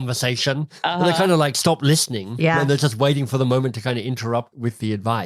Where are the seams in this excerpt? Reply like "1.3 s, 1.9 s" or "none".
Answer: 2.6 s